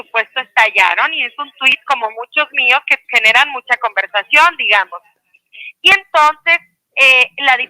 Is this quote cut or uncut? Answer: uncut